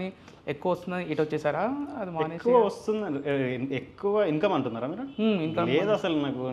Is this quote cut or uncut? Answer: uncut